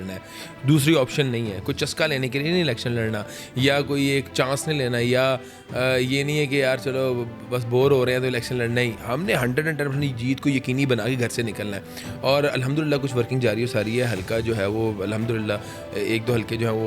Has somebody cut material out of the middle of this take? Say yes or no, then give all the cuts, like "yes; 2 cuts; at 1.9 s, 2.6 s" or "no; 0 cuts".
no; 0 cuts